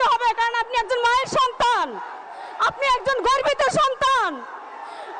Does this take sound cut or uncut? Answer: uncut